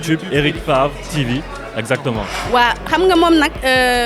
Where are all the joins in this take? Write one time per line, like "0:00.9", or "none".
0:02.4